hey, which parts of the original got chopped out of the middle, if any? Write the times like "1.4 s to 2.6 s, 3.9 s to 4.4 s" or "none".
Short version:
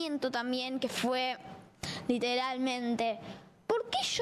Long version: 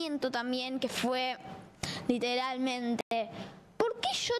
3.0 s to 3.1 s